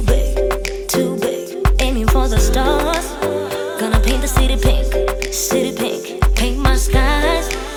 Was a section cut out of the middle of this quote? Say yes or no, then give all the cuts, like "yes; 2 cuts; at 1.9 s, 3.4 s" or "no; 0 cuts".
no; 0 cuts